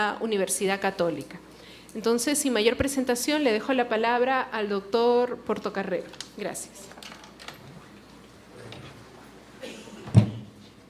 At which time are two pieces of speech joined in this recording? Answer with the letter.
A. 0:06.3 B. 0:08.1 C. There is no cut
A